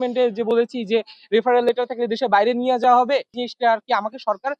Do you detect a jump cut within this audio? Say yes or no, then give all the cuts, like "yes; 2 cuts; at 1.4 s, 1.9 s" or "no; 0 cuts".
yes; 1 cut; at 3.4 s